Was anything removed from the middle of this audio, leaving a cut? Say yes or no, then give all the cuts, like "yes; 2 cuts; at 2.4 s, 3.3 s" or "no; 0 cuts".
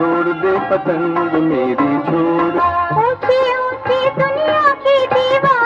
yes; 1 cut; at 2.6 s